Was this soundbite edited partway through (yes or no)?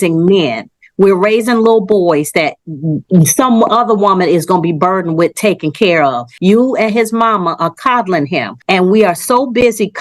yes